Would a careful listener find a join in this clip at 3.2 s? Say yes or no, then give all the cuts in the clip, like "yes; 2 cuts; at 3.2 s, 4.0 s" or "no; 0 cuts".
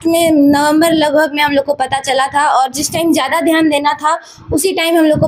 no; 0 cuts